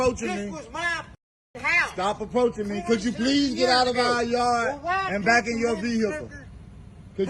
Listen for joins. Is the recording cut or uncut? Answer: cut